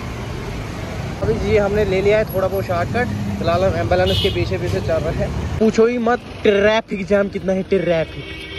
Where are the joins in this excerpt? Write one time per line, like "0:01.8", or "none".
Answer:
none